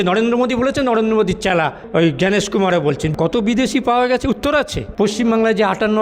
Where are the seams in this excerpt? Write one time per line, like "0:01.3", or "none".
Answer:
0:03.1
0:04.8

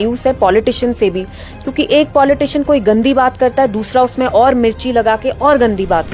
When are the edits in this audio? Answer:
none

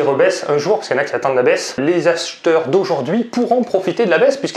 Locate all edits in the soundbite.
none

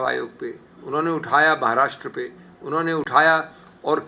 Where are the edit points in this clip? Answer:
none

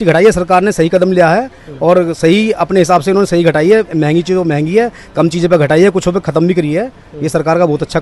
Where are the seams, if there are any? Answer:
none

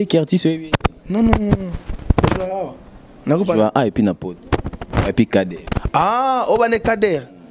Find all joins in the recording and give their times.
none

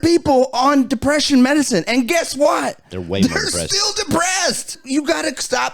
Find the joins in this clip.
0:04.8

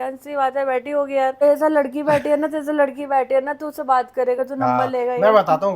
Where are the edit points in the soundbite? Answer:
0:01.4

